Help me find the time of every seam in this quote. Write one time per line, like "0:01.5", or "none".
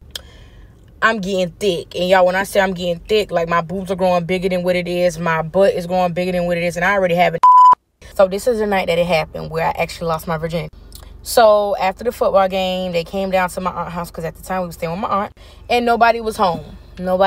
0:08.0